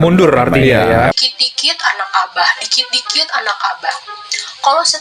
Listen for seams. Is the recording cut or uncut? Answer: cut